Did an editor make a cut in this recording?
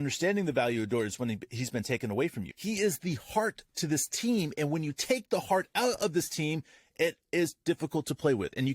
yes; 1 cut; at 2.5 s

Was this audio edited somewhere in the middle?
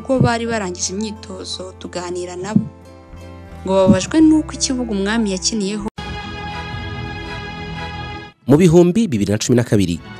yes; 1 cut; at 5.9 s

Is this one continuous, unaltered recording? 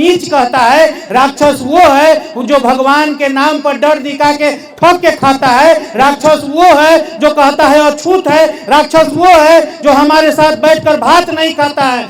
yes; 0 cuts

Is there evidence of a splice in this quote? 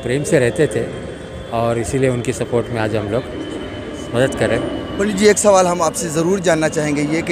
no; 0 cuts

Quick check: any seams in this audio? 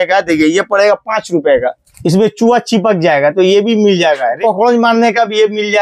yes; 2 cuts; at 1.9 s, 4.4 s

